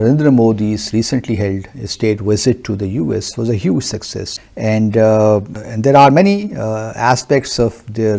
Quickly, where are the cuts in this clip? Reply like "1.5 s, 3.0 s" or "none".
4.2 s